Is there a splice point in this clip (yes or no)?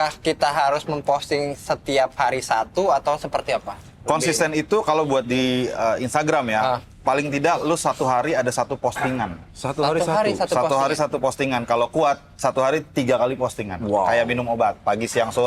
no